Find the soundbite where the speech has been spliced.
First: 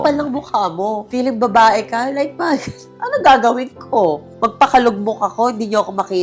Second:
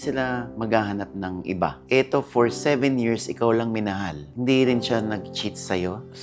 first; 1 cut; at 2.9 s

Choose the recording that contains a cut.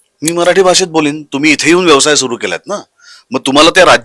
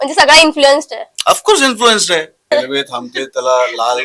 second; 1 cut; at 2.5 s

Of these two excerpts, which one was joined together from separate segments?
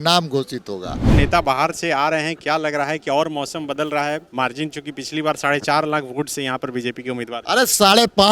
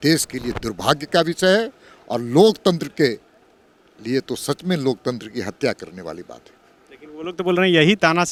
first; 1 cut; at 1.1 s

